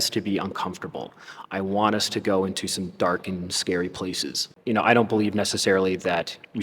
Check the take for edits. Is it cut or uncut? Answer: cut